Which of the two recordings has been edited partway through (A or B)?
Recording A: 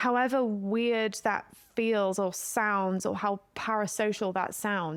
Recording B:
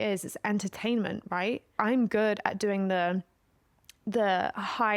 B